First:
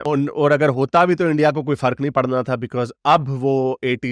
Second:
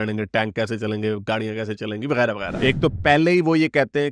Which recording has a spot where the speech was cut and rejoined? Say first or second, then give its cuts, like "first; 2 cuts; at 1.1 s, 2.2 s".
second; 1 cut; at 2.6 s